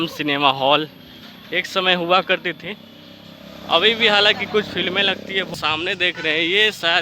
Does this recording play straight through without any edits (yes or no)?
no